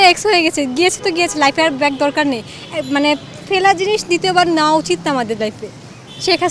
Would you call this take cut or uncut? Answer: uncut